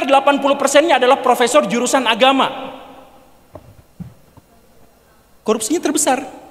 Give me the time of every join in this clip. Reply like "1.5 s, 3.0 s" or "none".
none